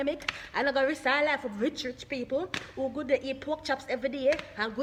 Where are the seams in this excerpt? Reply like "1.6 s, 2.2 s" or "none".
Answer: none